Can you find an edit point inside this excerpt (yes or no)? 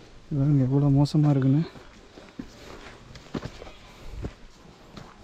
no